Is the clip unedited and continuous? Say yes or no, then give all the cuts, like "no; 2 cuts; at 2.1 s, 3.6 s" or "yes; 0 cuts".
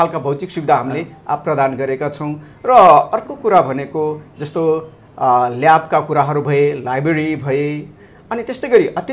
yes; 0 cuts